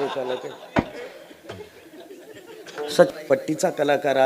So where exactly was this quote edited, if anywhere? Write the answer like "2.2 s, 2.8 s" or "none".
3.4 s